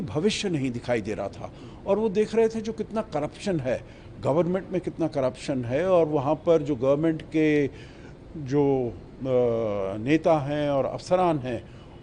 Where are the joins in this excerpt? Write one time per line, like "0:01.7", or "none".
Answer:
none